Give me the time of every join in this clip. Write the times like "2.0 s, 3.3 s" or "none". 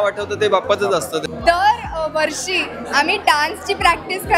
1.2 s